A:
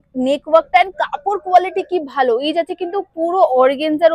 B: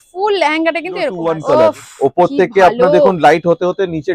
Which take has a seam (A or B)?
B